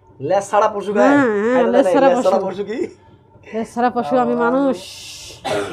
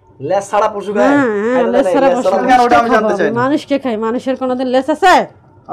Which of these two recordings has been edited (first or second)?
second